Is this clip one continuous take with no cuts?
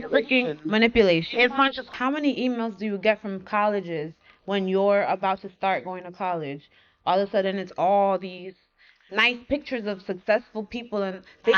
no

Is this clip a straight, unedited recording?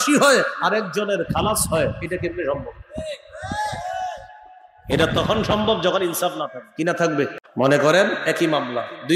no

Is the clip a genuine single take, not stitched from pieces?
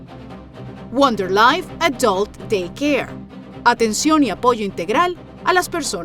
no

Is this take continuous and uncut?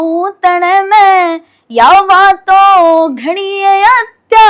yes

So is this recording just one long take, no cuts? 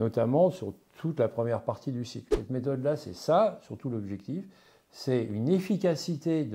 no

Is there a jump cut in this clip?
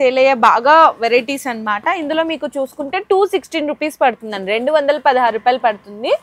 no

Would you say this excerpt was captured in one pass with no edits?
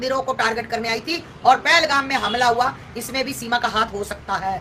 yes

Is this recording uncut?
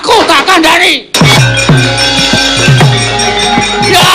no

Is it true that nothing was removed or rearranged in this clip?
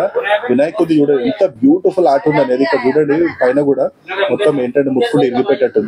yes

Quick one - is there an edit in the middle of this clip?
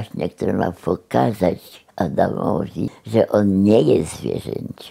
yes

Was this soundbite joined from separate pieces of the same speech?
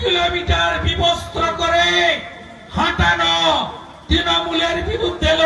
no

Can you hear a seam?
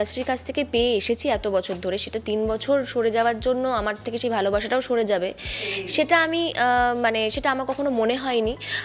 no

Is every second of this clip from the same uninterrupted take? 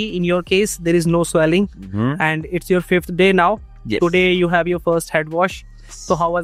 yes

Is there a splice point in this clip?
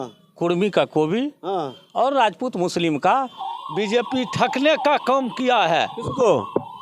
yes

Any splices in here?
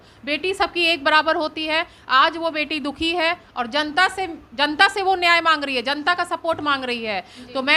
no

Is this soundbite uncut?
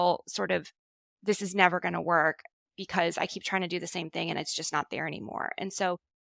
yes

